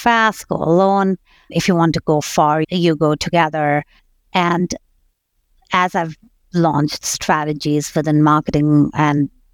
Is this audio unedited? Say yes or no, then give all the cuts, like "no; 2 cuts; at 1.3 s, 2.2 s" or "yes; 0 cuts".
no; 3 cuts; at 1.5 s, 2.7 s, 4.0 s